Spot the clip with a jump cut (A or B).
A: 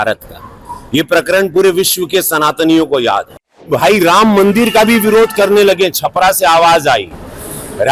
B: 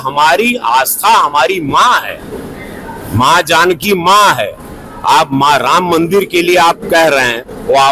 A